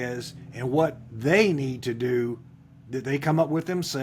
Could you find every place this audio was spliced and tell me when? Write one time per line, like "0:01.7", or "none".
none